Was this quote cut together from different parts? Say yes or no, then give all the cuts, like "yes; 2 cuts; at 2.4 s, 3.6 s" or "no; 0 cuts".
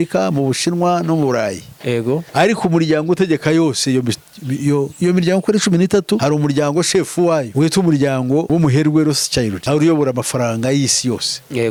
no; 0 cuts